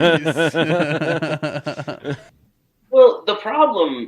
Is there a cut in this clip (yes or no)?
yes